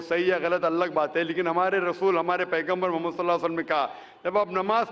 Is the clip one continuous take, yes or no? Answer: yes